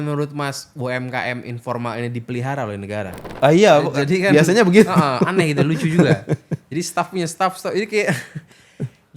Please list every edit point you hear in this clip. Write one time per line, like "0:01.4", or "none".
0:03.2

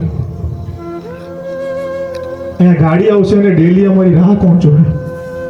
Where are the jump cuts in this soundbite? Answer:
none

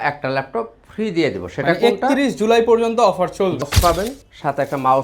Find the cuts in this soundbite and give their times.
0:03.6

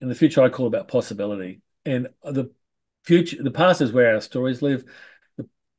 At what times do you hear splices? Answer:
none

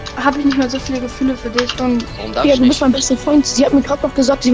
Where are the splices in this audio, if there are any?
0:02.1

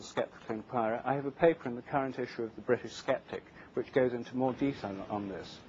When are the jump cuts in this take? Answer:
0:02.8

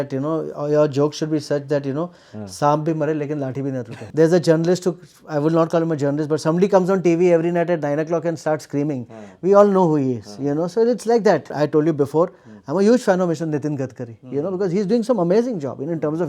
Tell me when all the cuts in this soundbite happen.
0:04.0
0:11.5

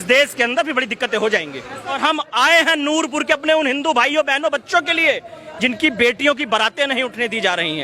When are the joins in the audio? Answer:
0:01.9

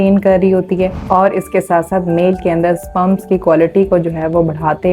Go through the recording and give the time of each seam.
0:01.0

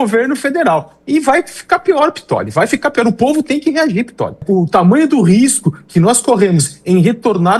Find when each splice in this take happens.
0:04.4

